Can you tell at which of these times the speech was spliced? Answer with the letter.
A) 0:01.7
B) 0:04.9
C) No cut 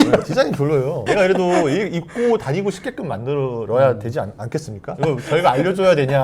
B